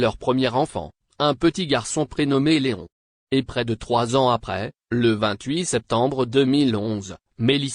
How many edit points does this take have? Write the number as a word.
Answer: one